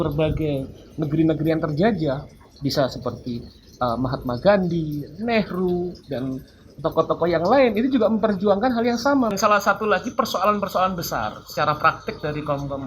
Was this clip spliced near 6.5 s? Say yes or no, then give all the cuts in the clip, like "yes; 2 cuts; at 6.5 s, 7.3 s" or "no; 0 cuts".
no; 1 cut; at 9.3 s